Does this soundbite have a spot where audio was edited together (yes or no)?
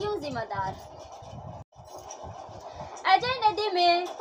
yes